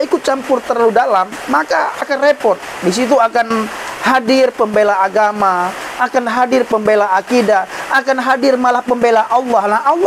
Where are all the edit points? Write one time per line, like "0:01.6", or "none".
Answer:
none